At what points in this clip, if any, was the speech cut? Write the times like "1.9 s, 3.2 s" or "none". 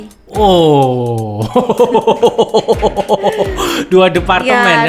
none